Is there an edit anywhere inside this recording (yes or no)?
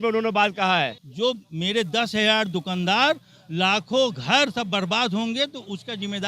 yes